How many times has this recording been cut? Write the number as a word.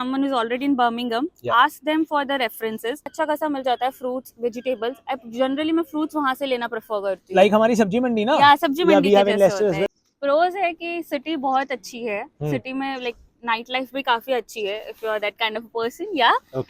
two